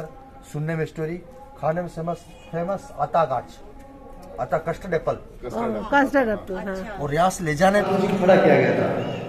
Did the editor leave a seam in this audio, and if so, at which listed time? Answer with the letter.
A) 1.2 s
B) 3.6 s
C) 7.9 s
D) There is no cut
C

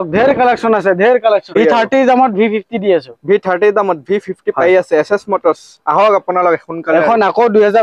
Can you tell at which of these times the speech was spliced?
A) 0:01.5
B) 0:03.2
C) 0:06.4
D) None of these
A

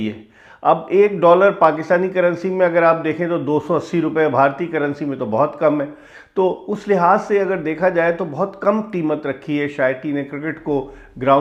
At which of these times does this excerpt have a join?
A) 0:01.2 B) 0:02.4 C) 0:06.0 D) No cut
D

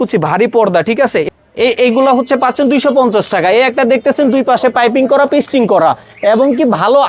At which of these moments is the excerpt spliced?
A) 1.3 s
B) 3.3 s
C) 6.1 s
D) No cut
A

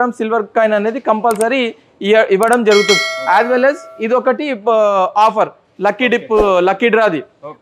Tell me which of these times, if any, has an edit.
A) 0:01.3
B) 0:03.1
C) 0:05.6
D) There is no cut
D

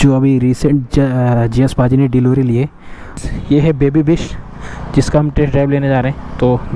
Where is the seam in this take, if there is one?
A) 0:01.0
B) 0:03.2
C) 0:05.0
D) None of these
B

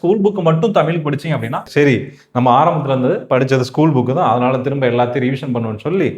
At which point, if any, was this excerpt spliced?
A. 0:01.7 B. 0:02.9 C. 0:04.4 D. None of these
A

